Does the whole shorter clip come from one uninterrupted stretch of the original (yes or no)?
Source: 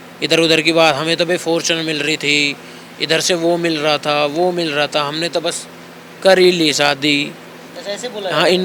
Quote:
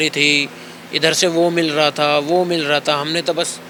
yes